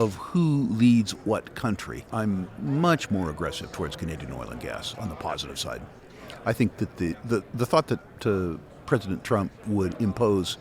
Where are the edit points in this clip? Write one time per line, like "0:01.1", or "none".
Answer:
0:02.1